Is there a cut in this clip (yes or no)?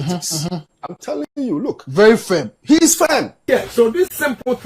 yes